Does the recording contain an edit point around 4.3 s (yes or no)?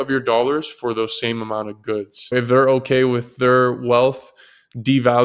no